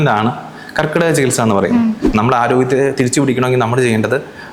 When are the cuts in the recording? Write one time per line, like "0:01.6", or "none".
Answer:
0:02.0